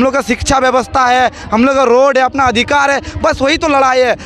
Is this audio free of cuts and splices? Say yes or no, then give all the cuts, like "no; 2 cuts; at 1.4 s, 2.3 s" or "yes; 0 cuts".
yes; 0 cuts